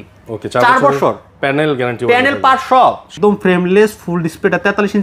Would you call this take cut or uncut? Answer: cut